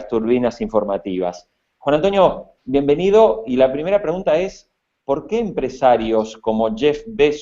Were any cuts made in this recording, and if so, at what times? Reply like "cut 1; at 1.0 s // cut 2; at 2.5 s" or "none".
cut 1; at 3.4 s